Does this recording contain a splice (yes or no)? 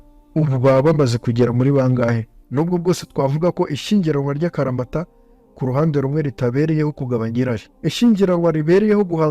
yes